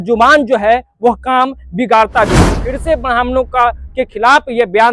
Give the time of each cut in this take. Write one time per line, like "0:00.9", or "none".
0:02.6